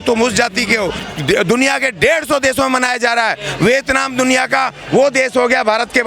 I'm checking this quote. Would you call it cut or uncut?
cut